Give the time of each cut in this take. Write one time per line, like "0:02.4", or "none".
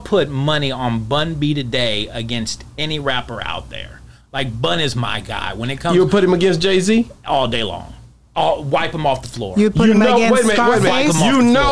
none